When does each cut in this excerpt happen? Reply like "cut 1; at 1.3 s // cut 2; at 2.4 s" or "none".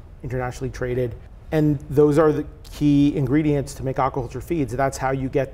cut 1; at 1.3 s